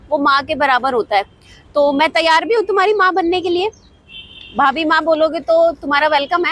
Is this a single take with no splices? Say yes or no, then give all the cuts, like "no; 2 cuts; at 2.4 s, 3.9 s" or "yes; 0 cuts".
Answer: yes; 0 cuts